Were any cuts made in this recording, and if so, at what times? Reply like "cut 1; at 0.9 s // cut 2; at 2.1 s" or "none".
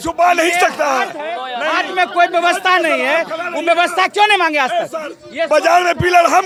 none